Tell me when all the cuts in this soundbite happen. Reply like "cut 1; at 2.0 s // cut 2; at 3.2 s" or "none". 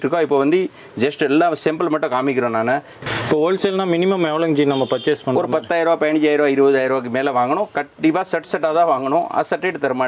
cut 1; at 2.9 s